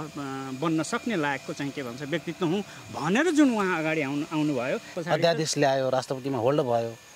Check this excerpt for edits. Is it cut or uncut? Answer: cut